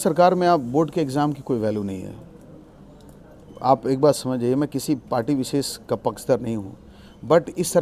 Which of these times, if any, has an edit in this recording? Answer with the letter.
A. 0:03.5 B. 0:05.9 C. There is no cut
C